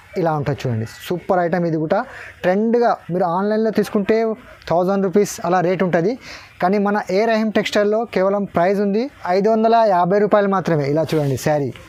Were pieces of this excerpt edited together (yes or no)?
no